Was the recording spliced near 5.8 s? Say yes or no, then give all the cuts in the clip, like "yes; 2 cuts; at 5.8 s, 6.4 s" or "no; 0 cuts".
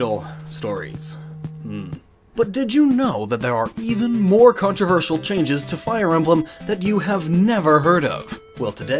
no; 1 cut; at 1.7 s